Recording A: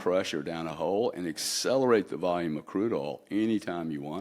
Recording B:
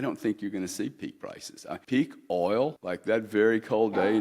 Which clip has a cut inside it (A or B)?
B